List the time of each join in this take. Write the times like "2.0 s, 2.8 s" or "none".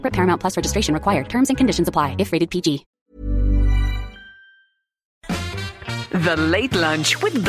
2.9 s, 5.1 s